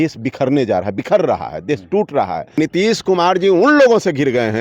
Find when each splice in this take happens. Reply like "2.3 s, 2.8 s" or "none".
2.6 s